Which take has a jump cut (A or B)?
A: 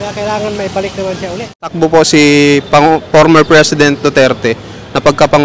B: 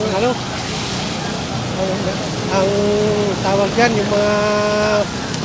A